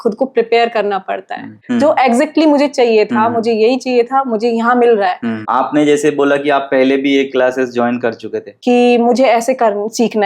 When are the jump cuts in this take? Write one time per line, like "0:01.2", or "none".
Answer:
0:01.6
0:05.3
0:08.5